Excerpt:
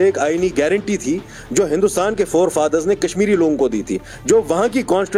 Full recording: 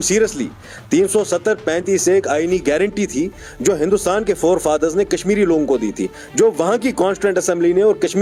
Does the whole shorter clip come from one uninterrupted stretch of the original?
yes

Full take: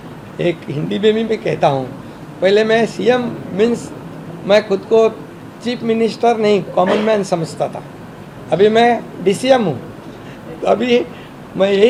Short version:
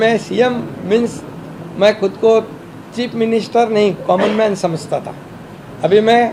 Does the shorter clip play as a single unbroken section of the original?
yes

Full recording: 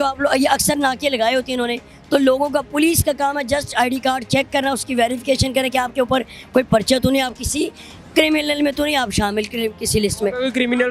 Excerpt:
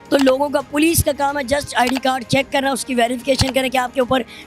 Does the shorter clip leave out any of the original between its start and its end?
no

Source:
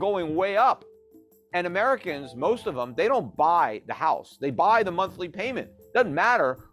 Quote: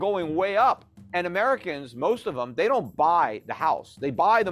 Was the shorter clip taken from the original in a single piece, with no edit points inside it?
no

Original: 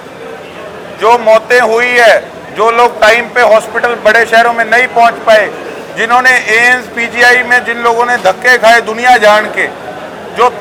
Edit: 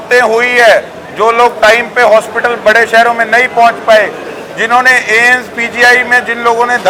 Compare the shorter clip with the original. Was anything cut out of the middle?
no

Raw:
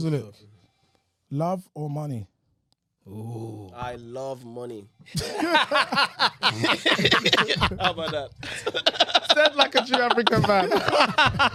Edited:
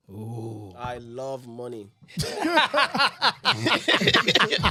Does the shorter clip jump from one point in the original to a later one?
no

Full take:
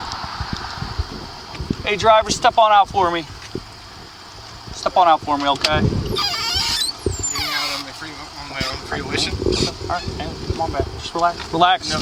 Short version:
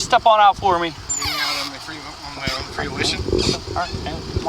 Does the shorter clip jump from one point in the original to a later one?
yes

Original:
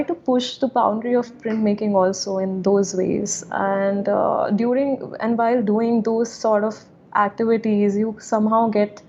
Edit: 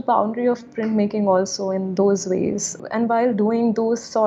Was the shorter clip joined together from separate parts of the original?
yes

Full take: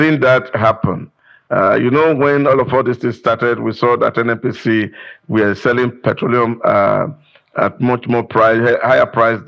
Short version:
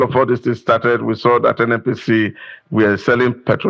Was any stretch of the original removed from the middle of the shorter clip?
no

